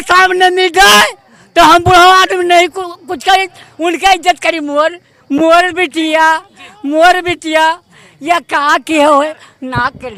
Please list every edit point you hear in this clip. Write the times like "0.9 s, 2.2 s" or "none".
none